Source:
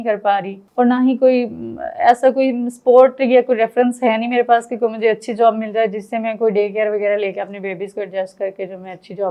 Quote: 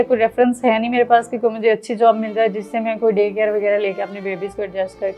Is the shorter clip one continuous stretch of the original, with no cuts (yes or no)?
yes